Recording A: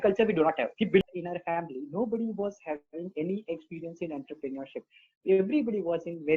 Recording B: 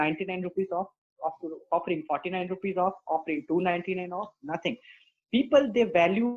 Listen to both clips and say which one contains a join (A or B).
A